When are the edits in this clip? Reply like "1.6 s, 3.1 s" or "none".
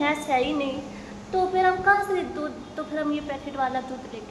none